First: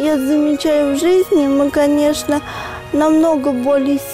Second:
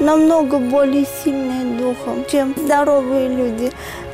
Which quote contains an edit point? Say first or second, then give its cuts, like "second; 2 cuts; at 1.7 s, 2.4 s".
second; 1 cut; at 2.4 s